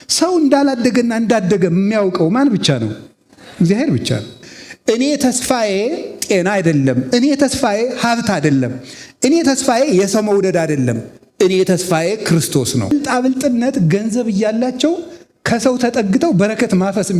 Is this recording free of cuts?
no; 2 cuts; at 4.3 s, 12.9 s

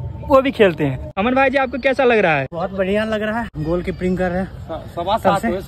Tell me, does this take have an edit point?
yes; 3 cuts; at 1.0 s, 2.5 s, 3.5 s

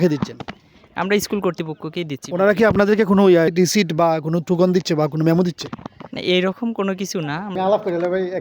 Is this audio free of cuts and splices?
no; 1 cut; at 7.5 s

